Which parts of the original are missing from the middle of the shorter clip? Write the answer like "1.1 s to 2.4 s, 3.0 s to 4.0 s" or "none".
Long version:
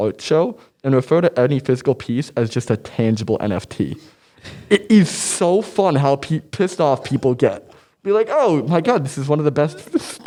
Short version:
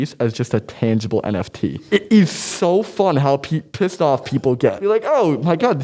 4.0 s to 4.6 s, 7.6 s to 8.0 s